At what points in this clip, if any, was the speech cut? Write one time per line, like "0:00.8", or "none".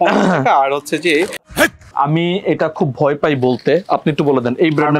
0:01.5